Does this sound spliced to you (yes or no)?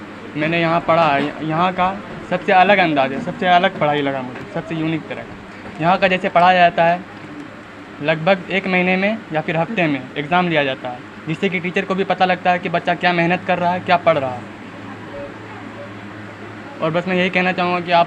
no